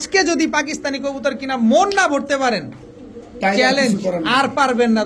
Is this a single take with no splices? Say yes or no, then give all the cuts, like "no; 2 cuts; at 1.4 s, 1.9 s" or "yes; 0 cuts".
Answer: yes; 0 cuts